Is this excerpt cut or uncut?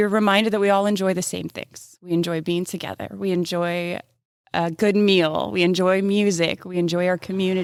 uncut